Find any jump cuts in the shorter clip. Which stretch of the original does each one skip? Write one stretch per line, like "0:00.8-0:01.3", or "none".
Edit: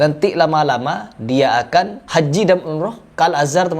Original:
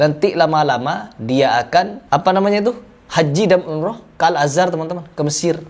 0:02.0-0:03.0